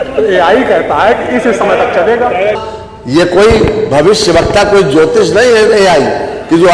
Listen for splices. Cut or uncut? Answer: cut